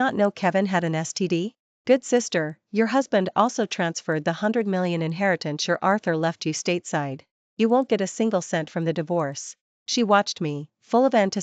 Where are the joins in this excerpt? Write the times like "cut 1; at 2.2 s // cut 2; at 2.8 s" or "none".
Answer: cut 1; at 1.6 s